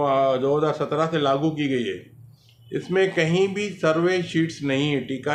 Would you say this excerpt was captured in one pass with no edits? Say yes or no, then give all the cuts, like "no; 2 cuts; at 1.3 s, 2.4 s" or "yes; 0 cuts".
yes; 0 cuts